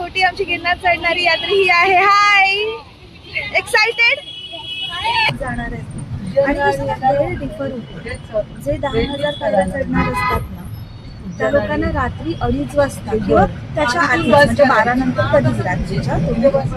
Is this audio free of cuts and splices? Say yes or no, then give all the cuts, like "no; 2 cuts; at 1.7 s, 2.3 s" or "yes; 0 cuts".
no; 1 cut; at 5.3 s